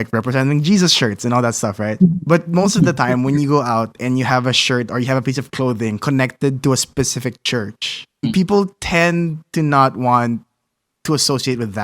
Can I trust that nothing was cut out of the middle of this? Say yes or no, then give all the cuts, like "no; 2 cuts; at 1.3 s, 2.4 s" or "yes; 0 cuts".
no; 1 cut; at 8.3 s